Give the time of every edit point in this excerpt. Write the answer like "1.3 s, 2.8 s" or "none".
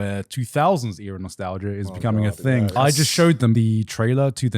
2.7 s, 3.5 s

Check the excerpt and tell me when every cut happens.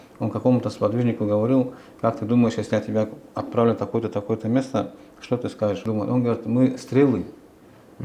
5.8 s

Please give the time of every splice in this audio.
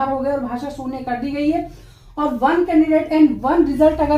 none

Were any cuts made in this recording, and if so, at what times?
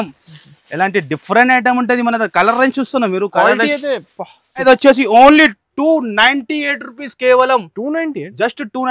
4.6 s

